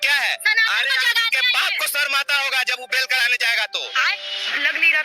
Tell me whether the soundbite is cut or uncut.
cut